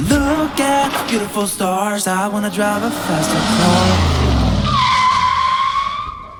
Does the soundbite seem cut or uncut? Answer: uncut